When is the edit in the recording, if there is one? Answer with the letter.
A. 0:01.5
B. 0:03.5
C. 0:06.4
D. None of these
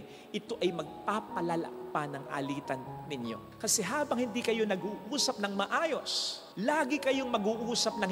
B